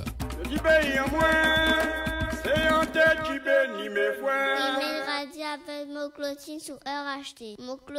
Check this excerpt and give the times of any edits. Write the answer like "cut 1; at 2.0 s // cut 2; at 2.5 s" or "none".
cut 1; at 4.8 s